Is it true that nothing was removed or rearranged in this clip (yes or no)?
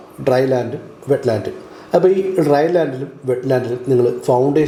yes